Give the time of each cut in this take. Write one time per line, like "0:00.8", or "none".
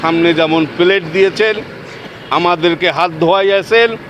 none